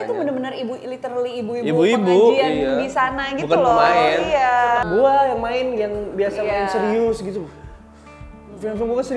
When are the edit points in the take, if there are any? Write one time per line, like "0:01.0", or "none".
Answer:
0:04.9